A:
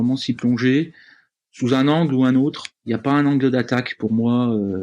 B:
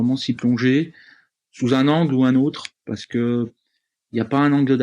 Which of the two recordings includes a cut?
A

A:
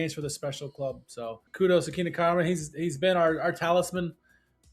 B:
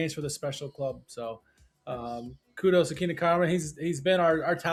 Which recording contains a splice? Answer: A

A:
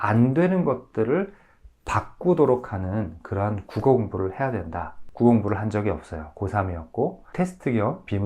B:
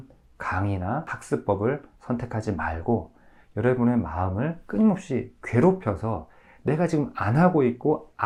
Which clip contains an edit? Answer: A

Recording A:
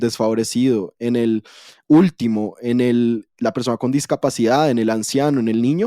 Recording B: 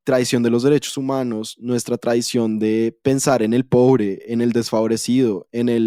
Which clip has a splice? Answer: A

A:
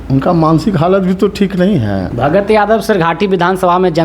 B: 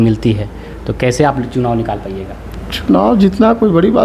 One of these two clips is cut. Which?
A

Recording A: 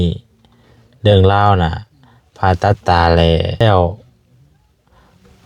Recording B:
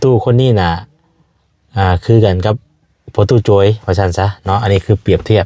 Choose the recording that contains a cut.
A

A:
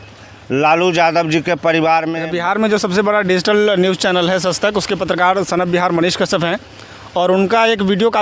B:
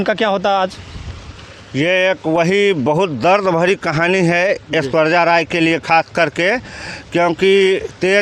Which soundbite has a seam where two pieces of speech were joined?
A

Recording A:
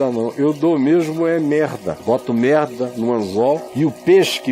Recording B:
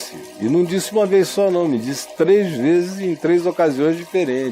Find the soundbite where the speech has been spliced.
A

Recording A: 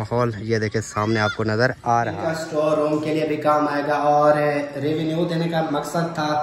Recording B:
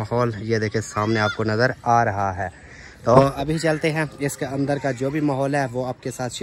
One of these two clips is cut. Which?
A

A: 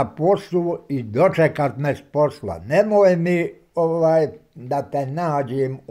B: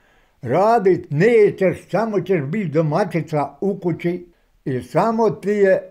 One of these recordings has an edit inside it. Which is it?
B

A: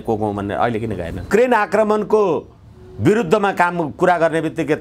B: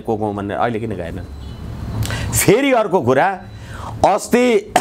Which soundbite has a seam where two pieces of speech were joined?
A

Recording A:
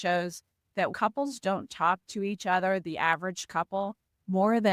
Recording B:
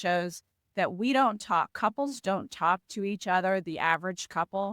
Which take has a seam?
A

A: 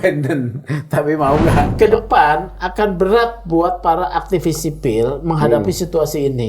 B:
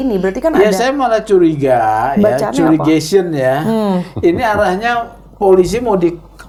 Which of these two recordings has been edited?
A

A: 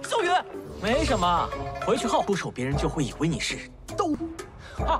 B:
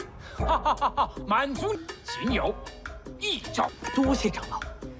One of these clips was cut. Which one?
A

